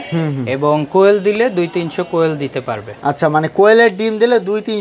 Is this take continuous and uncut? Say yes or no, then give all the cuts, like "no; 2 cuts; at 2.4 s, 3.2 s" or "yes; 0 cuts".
yes; 0 cuts